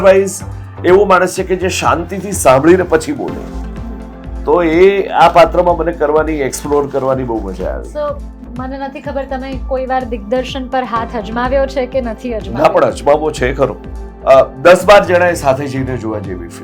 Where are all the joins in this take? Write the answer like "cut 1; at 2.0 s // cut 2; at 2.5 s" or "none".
cut 1; at 8.3 s // cut 2; at 13.9 s